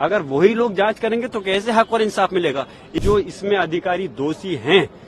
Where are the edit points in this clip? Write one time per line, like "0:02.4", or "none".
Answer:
0:02.9